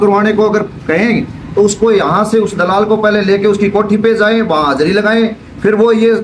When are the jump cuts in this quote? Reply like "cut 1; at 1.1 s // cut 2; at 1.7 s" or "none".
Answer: none